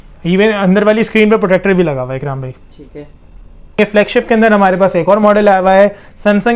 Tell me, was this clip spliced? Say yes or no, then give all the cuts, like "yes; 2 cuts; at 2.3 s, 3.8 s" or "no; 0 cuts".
yes; 1 cut; at 3.8 s